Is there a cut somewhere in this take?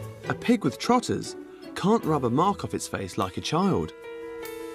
no; 0 cuts

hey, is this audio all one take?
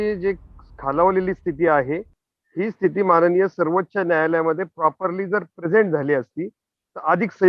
yes; 0 cuts

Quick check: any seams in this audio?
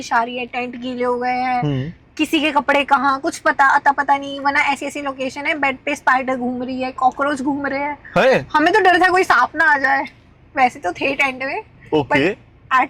no; 0 cuts

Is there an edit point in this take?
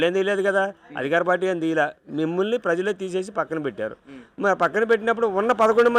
no; 0 cuts

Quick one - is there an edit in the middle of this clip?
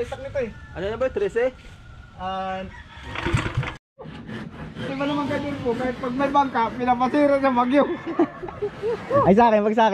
yes; 1 cut; at 3.8 s

